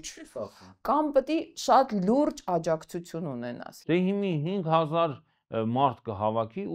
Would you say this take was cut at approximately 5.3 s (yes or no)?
no